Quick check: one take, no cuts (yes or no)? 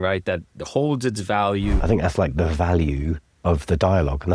no